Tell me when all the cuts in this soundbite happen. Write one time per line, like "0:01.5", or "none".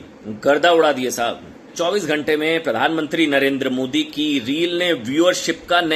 0:01.7